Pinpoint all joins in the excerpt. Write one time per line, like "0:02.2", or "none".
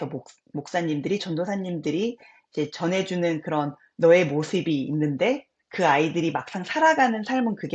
none

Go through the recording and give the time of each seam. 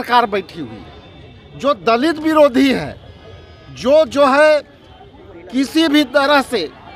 none

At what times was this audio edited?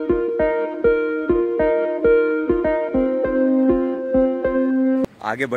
none

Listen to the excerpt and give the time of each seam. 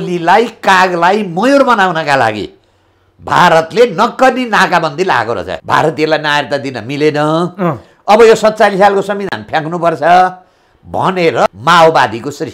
0:05.5
0:11.5

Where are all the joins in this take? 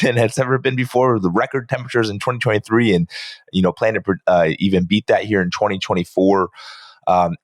none

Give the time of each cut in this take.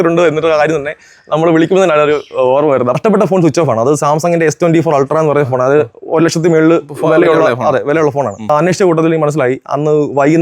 0:03.0
0:08.5

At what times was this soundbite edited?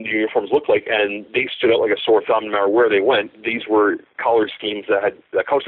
none

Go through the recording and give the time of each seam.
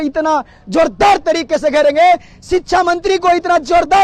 none

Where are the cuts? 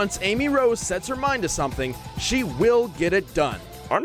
none

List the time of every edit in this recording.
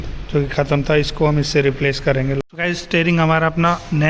0:02.4

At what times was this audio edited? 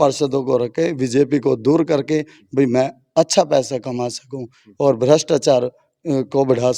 none

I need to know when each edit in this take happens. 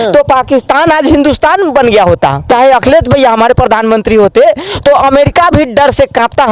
0:02.5

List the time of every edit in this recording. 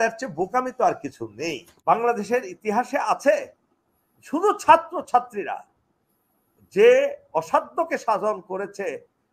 0:01.7

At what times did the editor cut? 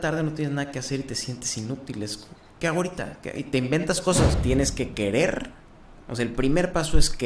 0:04.4

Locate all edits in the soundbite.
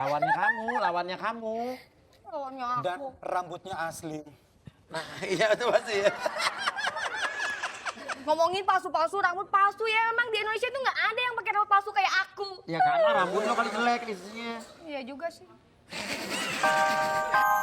0:16.6

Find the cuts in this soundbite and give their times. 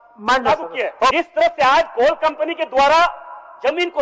0:01.1

